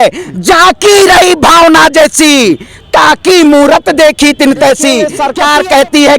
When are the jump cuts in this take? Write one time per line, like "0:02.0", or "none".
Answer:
0:05.2